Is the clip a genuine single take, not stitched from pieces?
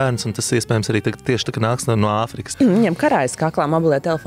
no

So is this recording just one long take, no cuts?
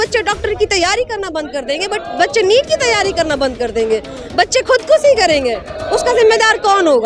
yes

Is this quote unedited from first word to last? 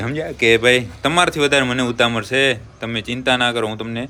yes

